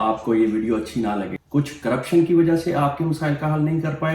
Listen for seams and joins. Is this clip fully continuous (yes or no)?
no